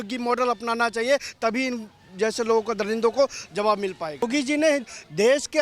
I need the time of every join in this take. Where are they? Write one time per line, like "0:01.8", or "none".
0:04.2